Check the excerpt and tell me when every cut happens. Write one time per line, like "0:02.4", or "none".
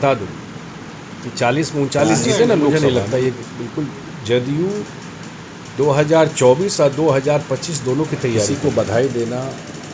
0:02.7
0:08.5